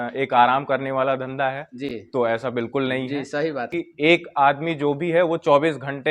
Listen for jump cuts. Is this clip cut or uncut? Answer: cut